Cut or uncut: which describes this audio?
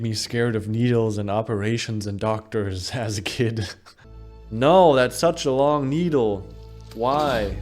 cut